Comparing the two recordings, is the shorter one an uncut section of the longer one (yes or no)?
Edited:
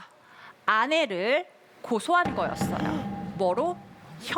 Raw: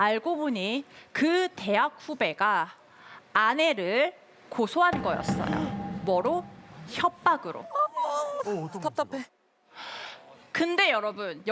yes